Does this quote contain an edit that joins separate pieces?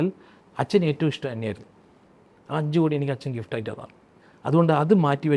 no; 0 cuts

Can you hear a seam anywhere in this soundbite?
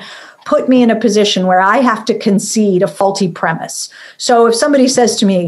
yes; 1 cut; at 3.0 s

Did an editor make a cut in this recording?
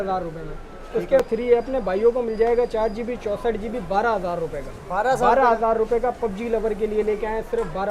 yes; 1 cut; at 1.2 s

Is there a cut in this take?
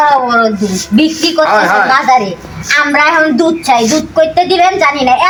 no; 0 cuts

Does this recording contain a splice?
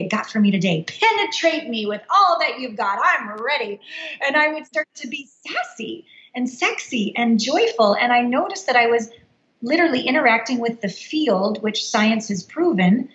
no; 0 cuts

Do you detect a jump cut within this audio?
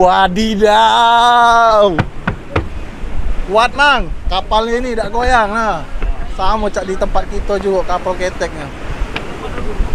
no; 0 cuts

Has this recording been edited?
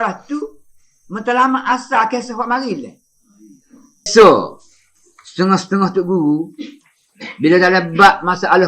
yes; 1 cut; at 4.1 s

